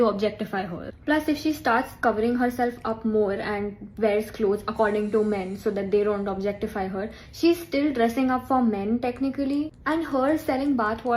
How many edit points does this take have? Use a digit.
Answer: 1